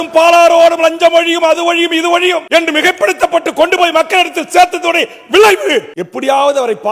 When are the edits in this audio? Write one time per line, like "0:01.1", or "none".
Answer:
0:02.4
0:06.0